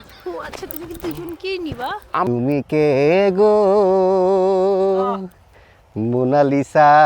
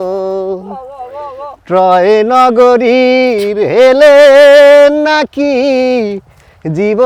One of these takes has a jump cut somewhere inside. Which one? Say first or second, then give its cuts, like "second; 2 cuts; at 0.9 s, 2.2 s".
first; 1 cut; at 2.3 s